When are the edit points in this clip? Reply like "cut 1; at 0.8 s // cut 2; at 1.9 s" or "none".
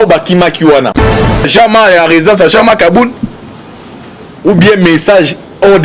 cut 1; at 1.1 s